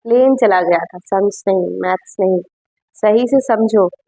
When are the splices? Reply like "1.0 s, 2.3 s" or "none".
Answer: none